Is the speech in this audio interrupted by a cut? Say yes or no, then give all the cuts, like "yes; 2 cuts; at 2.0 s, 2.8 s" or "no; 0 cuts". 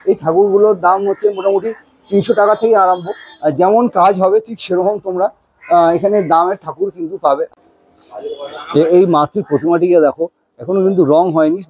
yes; 1 cut; at 7.5 s